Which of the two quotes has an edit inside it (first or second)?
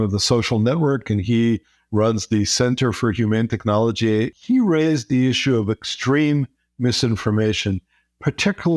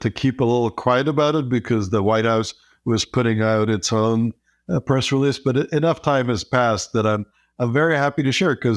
first